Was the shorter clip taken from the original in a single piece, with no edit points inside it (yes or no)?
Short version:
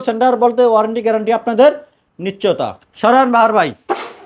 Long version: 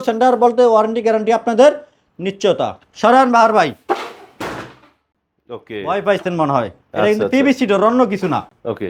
yes